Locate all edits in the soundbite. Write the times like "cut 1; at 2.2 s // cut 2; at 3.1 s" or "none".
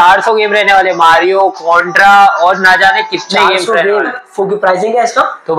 none